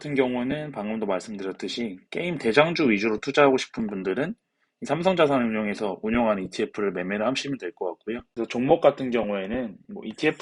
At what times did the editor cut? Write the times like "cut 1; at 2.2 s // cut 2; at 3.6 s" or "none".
cut 1; at 8.3 s

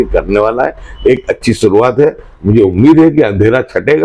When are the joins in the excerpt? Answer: none

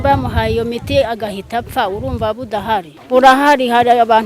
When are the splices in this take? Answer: cut 1; at 2.9 s

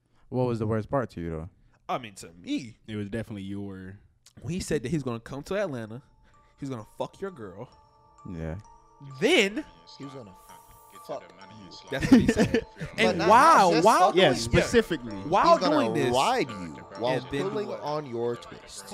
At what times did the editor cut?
none

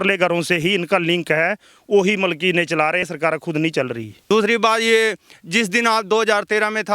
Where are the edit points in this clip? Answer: cut 1; at 3.0 s // cut 2; at 4.1 s

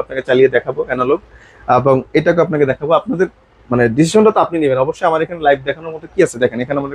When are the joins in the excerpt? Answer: none

